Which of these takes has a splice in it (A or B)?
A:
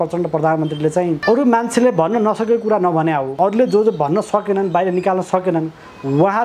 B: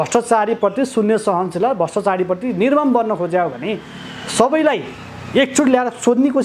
A